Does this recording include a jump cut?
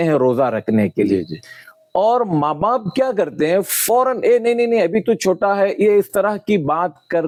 no; 0 cuts

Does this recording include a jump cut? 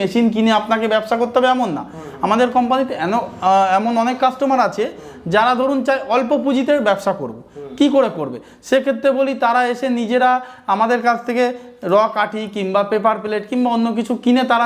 no; 0 cuts

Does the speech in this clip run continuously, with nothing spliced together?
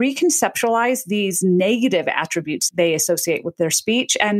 no; 1 cut; at 2.6 s

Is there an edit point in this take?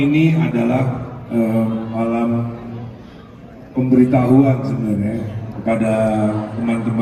no; 0 cuts

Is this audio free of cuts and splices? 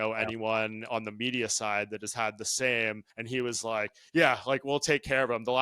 no; 1 cut; at 3.1 s

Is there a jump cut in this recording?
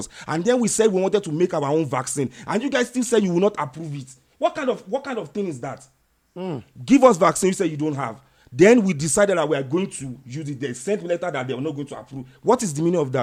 no; 0 cuts

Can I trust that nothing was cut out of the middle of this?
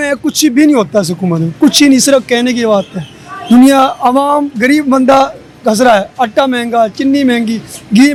yes; 0 cuts

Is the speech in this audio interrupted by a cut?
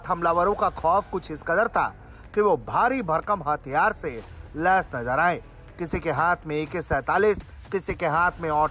no; 0 cuts

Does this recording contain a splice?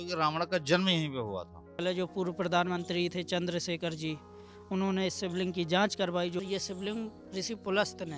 yes; 2 cuts; at 1.8 s, 6.4 s

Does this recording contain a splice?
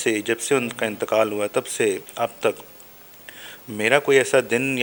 no; 0 cuts

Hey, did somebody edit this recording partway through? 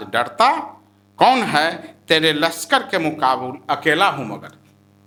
no; 0 cuts

